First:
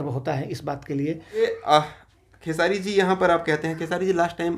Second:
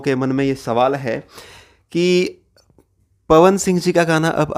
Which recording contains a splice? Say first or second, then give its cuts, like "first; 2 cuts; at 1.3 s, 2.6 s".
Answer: first; 1 cut; at 1.4 s